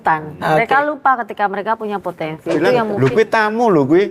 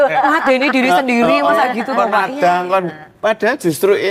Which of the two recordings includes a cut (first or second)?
first